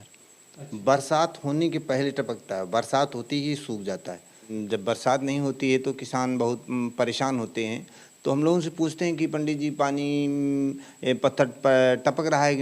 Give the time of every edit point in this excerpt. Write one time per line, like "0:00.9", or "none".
0:04.6